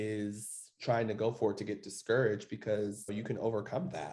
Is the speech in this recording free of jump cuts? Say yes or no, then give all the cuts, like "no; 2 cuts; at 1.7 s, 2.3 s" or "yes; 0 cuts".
no; 1 cut; at 3.1 s